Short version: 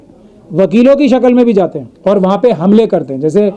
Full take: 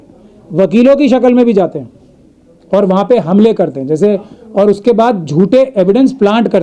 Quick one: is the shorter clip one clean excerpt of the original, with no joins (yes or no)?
no